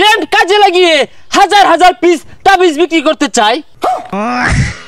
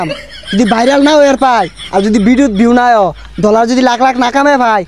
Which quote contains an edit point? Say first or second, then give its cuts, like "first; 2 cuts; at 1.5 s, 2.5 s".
first; 1 cut; at 3.9 s